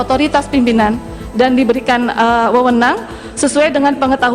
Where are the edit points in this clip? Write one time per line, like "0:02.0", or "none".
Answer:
none